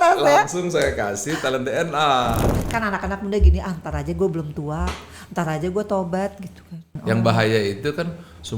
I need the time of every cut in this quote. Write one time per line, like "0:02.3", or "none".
0:02.5
0:06.9